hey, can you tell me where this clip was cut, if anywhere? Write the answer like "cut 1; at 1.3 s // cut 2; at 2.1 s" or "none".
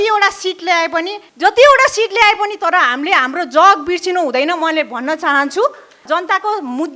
cut 1; at 1.2 s // cut 2; at 6.0 s

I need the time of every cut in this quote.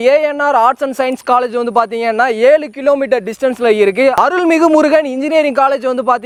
none

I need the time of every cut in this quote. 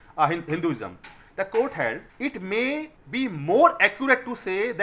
cut 1; at 2.1 s // cut 2; at 3.0 s

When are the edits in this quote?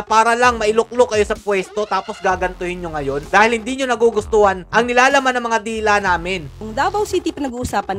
cut 1; at 6.4 s

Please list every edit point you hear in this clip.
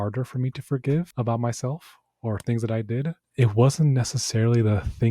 cut 1; at 1.1 s // cut 2; at 3.2 s

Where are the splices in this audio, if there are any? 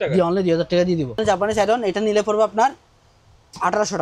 cut 1; at 1.2 s

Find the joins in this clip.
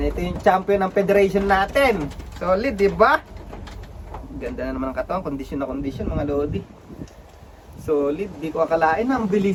none

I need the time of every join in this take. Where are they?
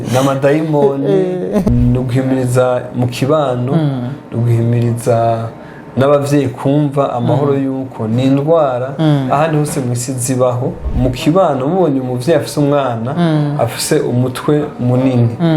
cut 1; at 1.7 s // cut 2; at 10.8 s

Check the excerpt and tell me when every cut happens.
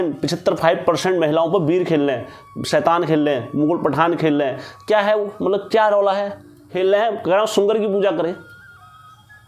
cut 1; at 6.7 s

